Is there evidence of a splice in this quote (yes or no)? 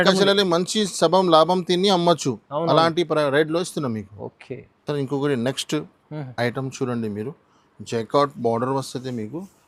no